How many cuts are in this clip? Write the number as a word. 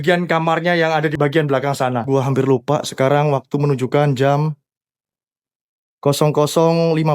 two